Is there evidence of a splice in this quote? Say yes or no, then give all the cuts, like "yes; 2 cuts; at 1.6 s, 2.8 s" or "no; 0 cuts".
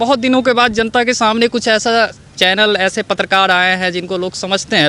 no; 0 cuts